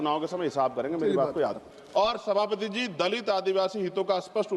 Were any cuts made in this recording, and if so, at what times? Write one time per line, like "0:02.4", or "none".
0:01.6